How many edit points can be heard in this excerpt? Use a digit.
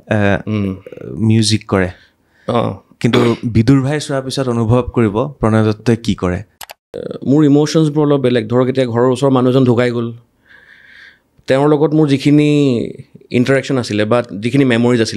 1